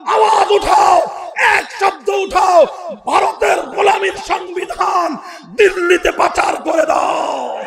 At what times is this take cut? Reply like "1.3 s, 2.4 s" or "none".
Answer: none